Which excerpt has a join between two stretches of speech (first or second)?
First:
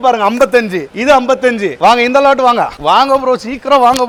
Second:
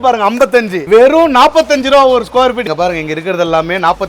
second